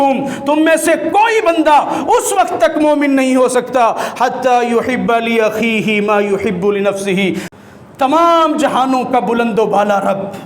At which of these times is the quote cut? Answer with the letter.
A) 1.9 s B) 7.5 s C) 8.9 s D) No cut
B